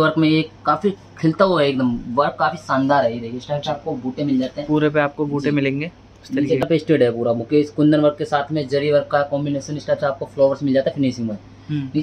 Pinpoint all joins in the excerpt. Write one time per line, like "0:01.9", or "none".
0:06.6